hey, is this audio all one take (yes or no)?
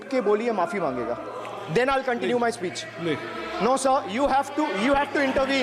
yes